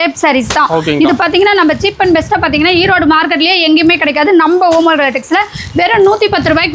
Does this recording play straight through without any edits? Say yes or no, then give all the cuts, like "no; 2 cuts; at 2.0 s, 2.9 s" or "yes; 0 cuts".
yes; 0 cuts